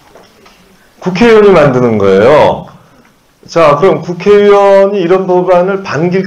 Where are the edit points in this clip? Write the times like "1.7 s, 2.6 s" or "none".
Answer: none